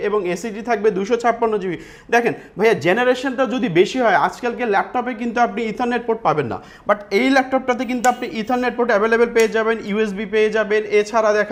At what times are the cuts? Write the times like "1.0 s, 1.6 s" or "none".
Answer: none